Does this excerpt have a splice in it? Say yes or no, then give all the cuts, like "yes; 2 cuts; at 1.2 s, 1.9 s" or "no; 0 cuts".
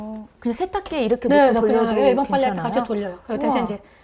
no; 0 cuts